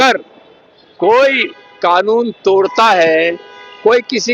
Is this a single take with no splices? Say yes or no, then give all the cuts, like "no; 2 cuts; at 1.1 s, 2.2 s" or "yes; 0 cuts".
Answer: yes; 0 cuts